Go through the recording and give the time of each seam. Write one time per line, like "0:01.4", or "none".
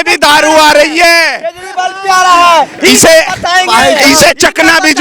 none